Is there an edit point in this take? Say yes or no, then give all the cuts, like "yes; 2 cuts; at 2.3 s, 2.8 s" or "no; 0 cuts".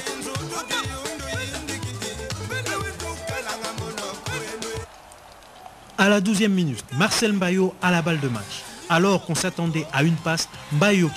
yes; 1 cut; at 8.2 s